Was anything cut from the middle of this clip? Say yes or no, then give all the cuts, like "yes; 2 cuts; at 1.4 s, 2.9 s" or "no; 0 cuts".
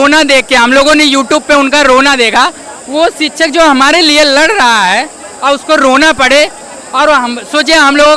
no; 0 cuts